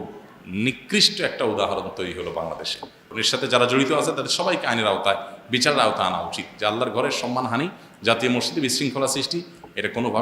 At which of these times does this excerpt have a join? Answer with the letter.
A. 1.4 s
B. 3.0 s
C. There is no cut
B